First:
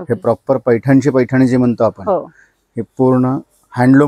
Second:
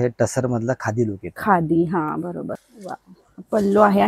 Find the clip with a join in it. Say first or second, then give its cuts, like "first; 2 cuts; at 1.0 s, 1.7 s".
second; 1 cut; at 2.7 s